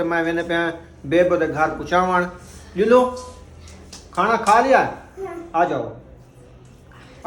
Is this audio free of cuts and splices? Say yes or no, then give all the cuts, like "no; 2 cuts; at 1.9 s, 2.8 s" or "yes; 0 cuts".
yes; 0 cuts